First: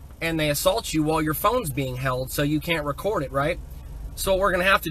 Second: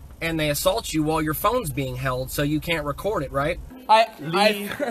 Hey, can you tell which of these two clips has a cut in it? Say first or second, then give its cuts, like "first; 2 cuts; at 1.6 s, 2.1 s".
second; 1 cut; at 3.7 s